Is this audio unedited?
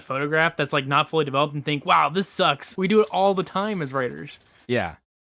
no; 1 cut; at 2.7 s

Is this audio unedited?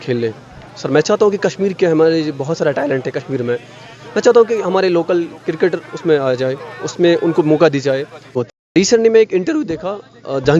no; 1 cut; at 8.4 s

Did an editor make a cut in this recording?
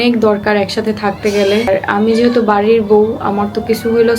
yes; 1 cut; at 1.7 s

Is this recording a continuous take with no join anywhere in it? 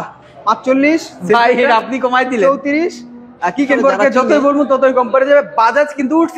no; 1 cut; at 3.8 s

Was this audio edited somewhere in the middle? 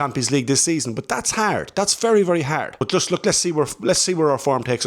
yes; 1 cut; at 2.7 s

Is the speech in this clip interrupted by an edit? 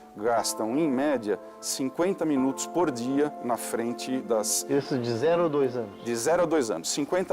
yes; 1 cut; at 4.2 s

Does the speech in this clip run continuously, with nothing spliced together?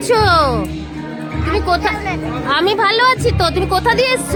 yes; 0 cuts

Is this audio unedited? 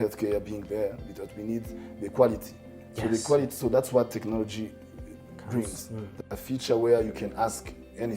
no; 1 cut; at 6.2 s

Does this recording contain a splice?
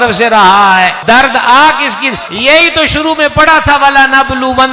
yes; 2 cuts; at 1.0 s, 2.3 s

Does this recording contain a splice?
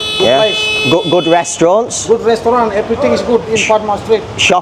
no; 0 cuts

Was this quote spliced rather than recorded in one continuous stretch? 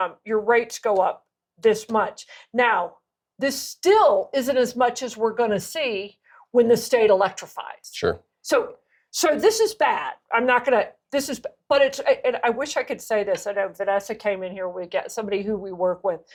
no; 0 cuts

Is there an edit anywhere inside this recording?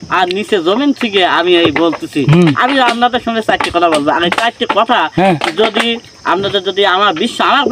no; 0 cuts

